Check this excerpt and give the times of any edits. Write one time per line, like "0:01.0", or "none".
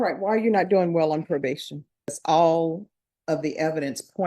0:02.1